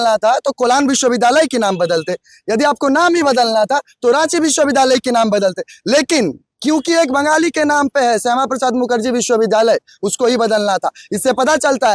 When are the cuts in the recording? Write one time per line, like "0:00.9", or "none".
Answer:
none